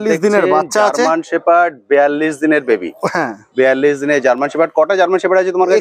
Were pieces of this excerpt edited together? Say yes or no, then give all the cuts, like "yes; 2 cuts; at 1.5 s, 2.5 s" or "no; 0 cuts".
no; 0 cuts